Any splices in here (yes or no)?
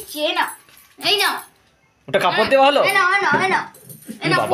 no